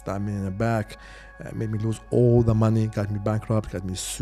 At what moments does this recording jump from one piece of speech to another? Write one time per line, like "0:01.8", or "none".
none